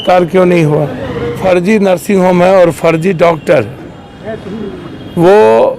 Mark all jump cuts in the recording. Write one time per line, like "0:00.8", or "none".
0:01.4